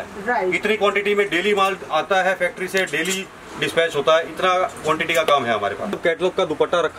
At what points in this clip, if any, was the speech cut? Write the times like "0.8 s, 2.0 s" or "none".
5.9 s